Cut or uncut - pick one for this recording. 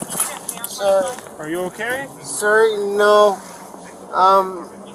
uncut